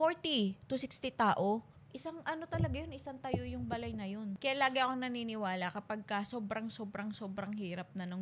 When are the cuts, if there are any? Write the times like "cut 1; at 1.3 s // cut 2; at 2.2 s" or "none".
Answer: cut 1; at 4.3 s